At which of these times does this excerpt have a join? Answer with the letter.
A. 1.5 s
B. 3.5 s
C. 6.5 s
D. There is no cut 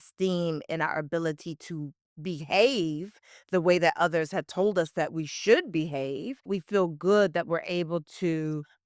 C